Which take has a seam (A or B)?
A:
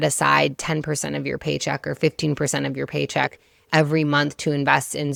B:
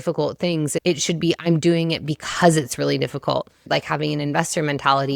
B